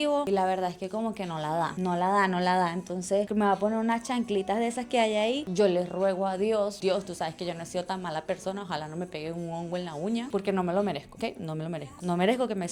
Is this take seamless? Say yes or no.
yes